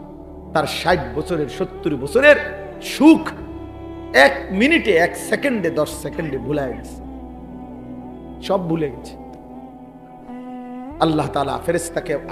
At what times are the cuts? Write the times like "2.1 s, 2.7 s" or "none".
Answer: 6.8 s, 8.3 s